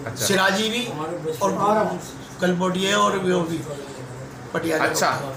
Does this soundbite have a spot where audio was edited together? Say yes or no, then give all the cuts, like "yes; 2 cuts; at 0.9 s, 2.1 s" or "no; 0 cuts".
no; 0 cuts